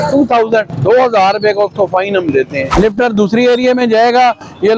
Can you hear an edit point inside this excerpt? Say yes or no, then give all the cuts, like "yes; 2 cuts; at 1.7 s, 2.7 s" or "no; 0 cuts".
yes; 1 cut; at 2.6 s